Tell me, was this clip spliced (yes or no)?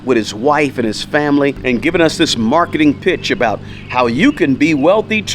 yes